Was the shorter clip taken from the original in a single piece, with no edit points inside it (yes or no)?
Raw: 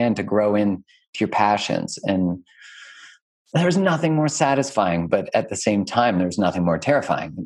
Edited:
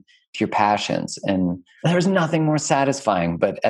no